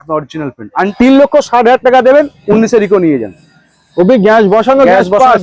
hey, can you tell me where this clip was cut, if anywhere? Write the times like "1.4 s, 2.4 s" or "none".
0.9 s